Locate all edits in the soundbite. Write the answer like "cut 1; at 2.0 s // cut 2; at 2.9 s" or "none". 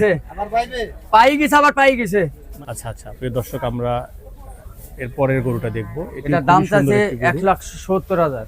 cut 1; at 2.4 s